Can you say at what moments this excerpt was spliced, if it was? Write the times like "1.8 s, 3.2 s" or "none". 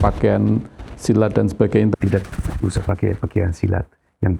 1.9 s